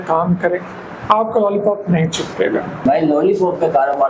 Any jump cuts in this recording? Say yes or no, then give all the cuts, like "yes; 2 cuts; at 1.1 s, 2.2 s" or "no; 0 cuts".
yes; 1 cut; at 2.8 s